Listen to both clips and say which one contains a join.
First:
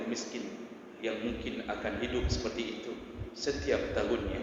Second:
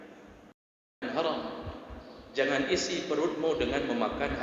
second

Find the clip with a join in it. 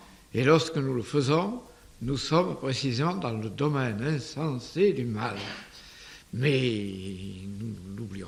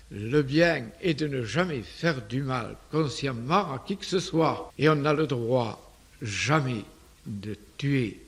second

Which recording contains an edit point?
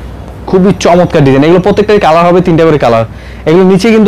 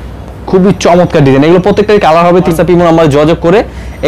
second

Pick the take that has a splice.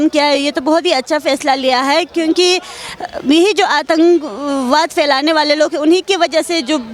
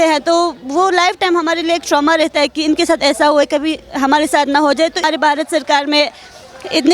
second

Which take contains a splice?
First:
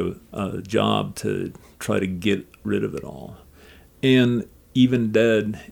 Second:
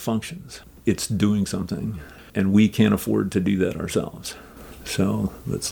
second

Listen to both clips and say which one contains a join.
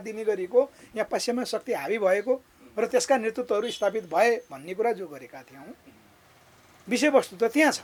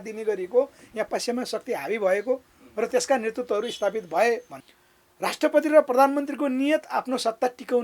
second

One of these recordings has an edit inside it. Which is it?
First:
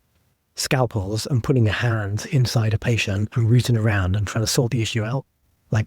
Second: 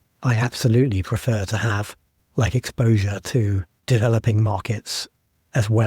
second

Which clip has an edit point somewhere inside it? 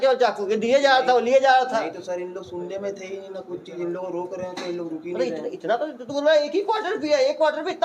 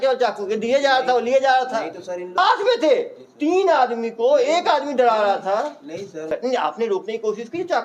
second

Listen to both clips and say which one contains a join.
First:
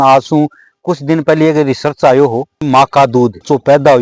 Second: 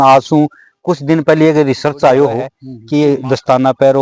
second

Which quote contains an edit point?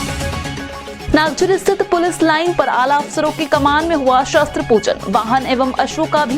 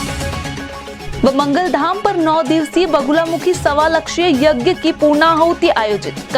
first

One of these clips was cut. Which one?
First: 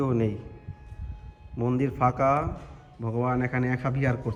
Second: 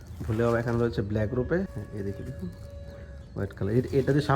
second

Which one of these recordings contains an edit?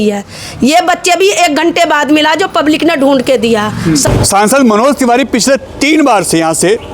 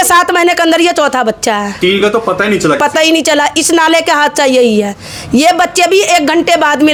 first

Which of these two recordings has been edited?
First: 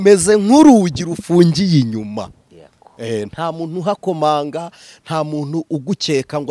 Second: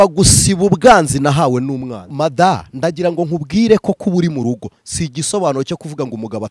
second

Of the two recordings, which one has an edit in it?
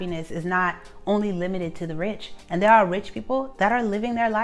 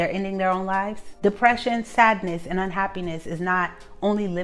second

